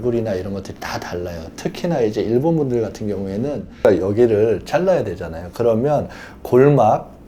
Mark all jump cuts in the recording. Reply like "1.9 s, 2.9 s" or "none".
3.8 s